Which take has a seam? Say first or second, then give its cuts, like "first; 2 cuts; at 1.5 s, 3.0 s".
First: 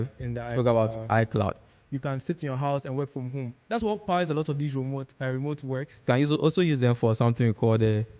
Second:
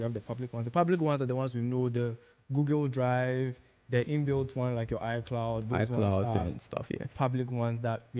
first; 2 cuts; at 1.8 s, 6.0 s